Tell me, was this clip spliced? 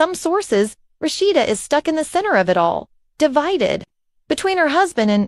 no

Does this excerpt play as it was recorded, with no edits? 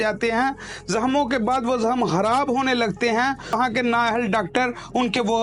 no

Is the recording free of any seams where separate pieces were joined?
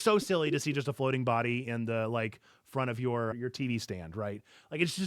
no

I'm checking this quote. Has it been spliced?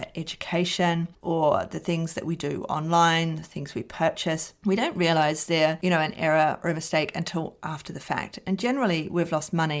no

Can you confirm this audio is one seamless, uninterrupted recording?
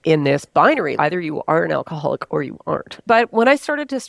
no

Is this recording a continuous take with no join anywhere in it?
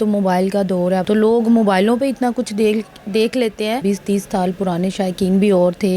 no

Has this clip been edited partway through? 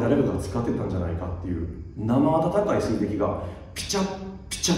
no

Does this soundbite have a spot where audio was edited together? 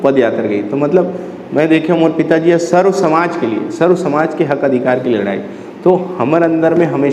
no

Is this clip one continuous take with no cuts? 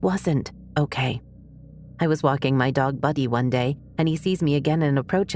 yes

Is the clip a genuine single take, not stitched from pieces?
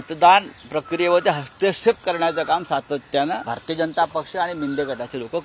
no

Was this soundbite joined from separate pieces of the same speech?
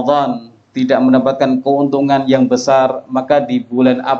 no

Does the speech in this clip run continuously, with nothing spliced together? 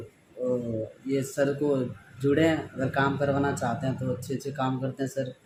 yes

